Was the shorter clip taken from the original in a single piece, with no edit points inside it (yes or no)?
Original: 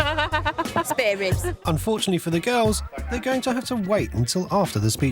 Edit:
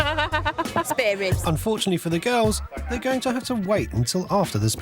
no